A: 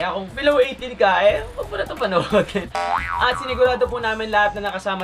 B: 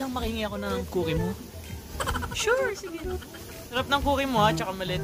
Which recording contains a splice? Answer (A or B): B